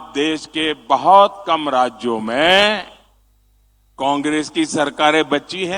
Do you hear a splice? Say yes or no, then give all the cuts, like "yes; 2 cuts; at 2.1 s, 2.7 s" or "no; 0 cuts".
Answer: no; 0 cuts